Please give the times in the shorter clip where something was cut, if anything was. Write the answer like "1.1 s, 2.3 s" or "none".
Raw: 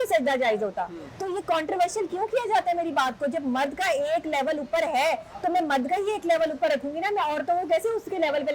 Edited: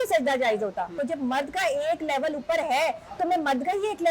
0.9 s